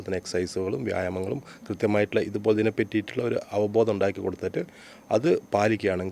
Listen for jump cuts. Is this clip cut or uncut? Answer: uncut